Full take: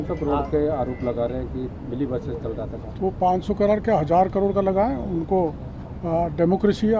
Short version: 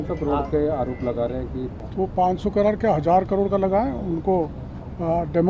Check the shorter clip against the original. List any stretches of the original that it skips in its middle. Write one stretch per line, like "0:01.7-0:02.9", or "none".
0:01.8-0:02.8